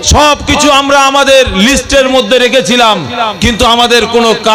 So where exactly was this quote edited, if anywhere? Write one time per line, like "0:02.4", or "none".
none